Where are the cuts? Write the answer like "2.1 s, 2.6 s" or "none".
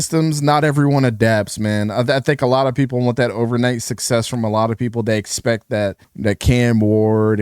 6.1 s